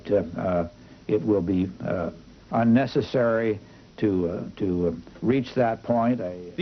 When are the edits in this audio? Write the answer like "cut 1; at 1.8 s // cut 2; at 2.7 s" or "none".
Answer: cut 1; at 2.8 s